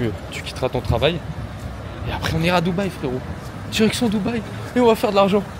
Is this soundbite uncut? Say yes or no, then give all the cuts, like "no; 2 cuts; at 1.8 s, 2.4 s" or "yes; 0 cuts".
yes; 0 cuts